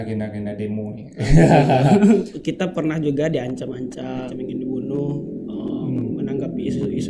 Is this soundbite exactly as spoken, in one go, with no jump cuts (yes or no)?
no